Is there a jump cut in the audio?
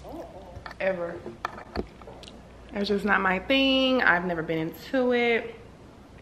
no; 0 cuts

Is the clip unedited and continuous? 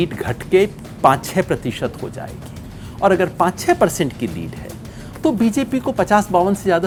yes; 0 cuts

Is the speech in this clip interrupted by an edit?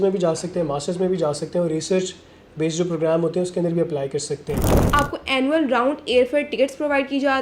yes; 1 cut; at 4.8 s

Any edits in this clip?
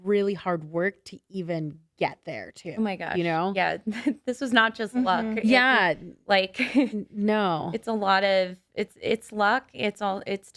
no; 0 cuts

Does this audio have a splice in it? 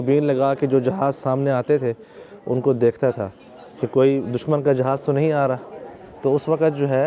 no; 0 cuts

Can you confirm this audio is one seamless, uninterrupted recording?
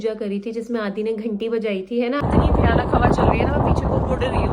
no; 1 cut; at 2.2 s

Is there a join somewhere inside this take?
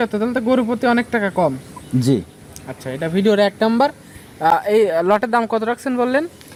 no; 0 cuts

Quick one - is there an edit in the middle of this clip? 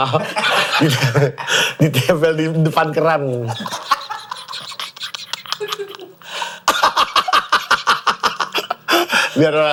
no; 0 cuts

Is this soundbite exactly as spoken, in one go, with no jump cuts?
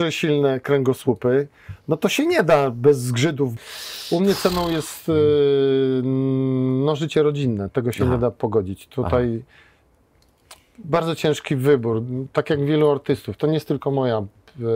no; 1 cut; at 3.5 s

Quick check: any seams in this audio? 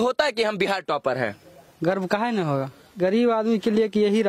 yes; 1 cut; at 2.8 s

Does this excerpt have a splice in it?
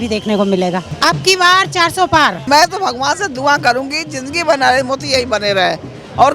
yes; 2 cuts; at 0.9 s, 2.5 s

